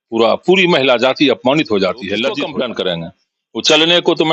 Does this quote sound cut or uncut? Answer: cut